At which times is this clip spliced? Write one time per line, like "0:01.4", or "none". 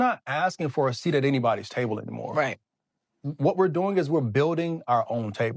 0:03.2